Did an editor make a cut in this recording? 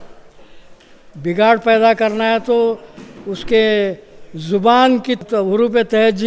yes; 1 cut; at 5.2 s

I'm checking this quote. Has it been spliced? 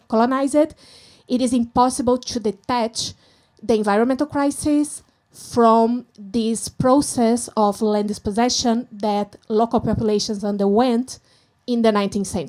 no; 0 cuts

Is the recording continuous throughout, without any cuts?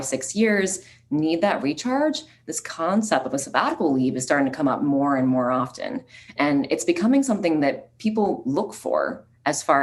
yes; 0 cuts

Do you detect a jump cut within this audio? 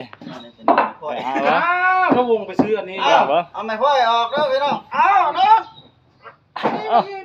no; 0 cuts

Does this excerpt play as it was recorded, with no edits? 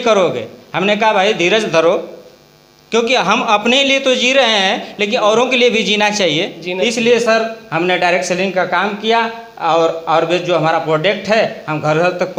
yes; 0 cuts

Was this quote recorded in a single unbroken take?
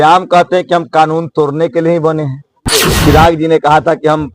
no; 1 cut; at 2.9 s

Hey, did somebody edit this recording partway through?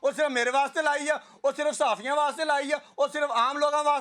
no; 0 cuts

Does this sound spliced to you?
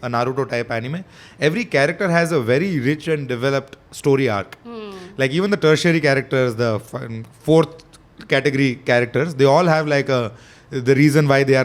no; 0 cuts

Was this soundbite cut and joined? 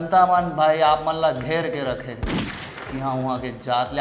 no; 0 cuts

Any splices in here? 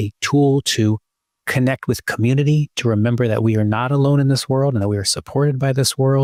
no; 0 cuts

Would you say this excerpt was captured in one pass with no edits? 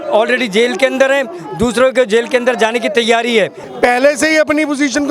no; 1 cut; at 3.6 s

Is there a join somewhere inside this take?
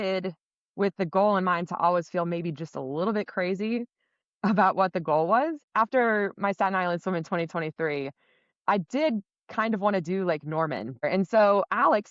yes; 2 cuts; at 5.6 s, 11.0 s

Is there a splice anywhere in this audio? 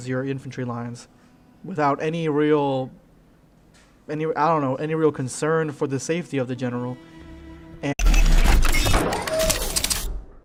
no; 0 cuts

